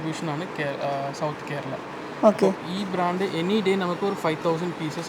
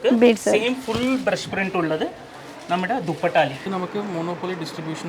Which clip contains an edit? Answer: second; 1 cut; at 3.7 s

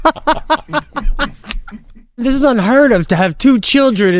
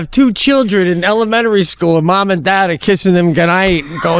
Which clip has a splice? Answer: first; 1 cut; at 2.2 s

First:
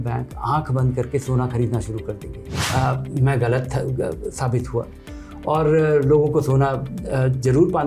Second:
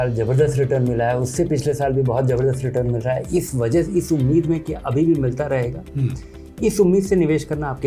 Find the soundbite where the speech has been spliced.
first; 1 cut; at 2.6 s

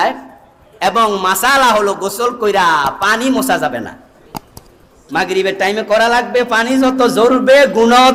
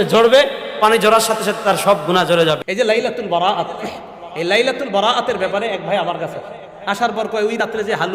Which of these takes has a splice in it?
second; 1 cut; at 2.6 s

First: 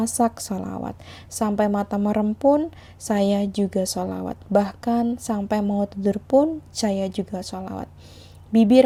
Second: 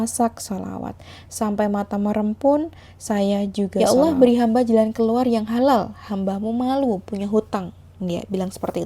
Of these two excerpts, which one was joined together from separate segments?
second; 1 cut; at 3.7 s

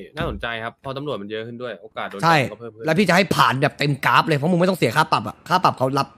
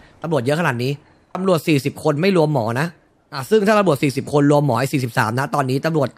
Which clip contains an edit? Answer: second; 1 cut; at 1.2 s

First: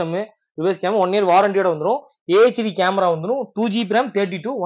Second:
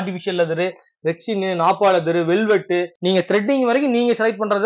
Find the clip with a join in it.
second; 1 cut; at 2.9 s

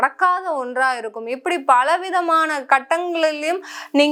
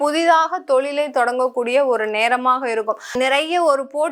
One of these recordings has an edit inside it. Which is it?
second; 1 cut; at 3.1 s

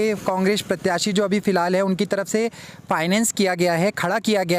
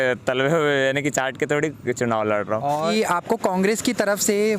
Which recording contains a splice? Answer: second; 1 cut; at 2.9 s

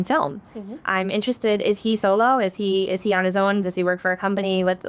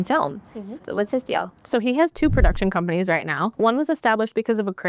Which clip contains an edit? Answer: second; 2 cuts; at 0.8 s, 3.5 s

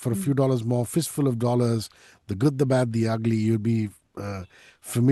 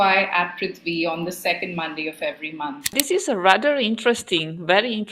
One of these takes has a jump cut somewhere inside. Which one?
second; 1 cut; at 3.0 s

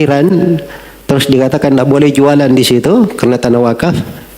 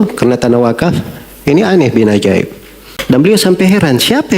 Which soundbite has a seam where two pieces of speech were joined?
second; 1 cut; at 2.9 s

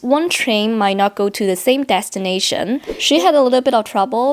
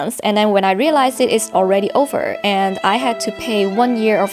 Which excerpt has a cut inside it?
first; 1 cut; at 2.8 s

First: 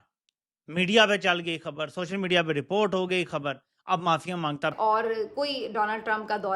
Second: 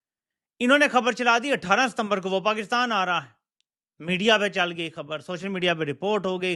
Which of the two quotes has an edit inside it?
first; 1 cut; at 4.8 s

